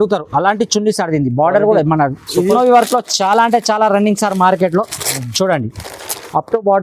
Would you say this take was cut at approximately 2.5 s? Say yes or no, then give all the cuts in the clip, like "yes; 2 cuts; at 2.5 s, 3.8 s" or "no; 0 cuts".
yes; 1 cut; at 2.5 s